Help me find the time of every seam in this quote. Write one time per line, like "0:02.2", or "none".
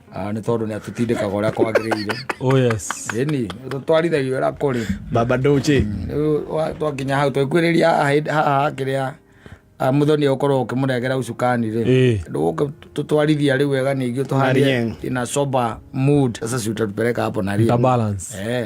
0:12.2
0:16.4